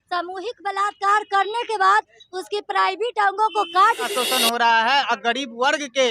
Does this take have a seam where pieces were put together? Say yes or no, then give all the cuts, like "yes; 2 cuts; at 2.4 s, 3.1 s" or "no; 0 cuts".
yes; 1 cut; at 4.1 s